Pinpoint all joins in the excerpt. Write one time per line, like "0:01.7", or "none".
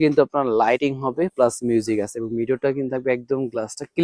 none

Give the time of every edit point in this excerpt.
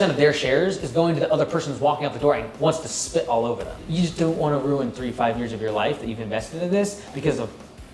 0:03.8

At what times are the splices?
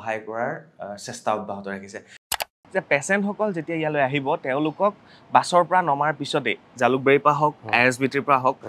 0:02.4

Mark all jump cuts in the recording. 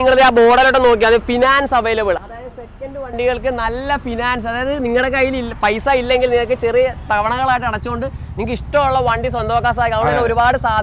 none

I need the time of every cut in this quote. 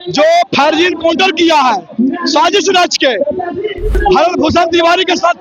0:03.9

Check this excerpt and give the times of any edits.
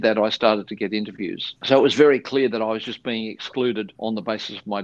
0:03.9

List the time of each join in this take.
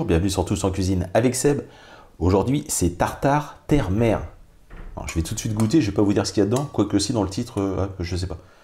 none

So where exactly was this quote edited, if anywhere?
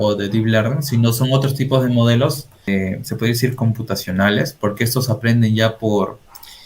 0:02.5

